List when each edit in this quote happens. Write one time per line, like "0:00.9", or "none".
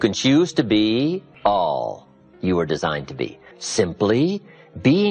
0:01.3
0:03.4